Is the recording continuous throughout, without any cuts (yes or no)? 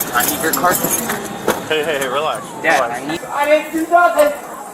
no